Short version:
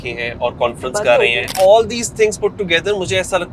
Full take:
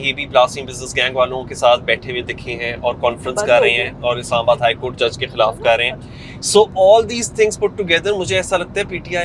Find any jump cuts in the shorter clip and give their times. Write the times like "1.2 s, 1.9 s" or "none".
1.5 s